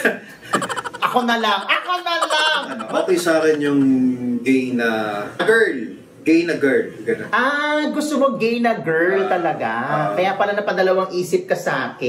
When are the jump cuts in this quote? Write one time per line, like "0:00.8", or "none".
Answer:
0:02.8
0:05.4